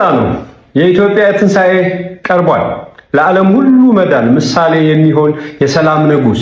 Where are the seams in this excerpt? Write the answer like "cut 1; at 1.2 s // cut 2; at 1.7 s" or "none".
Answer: none